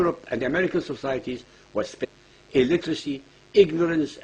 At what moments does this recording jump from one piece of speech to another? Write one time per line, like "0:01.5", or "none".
none